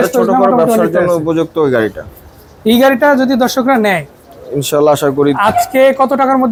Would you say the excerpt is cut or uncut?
uncut